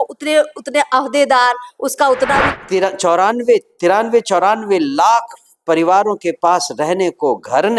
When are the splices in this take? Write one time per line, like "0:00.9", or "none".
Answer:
0:02.5